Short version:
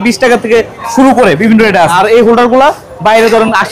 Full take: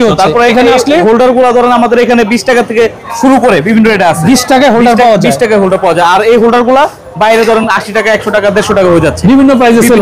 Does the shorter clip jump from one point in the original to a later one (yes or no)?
yes